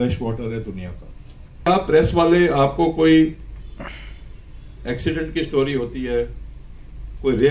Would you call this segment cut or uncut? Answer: cut